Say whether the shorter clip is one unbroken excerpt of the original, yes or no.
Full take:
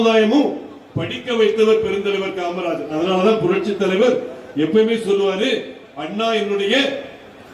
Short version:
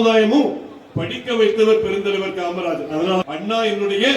no